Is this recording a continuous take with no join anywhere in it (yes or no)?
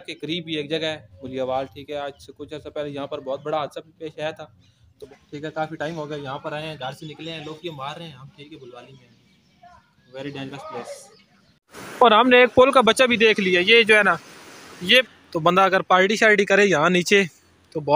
no